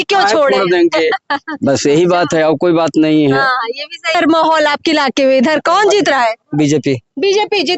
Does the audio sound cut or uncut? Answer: cut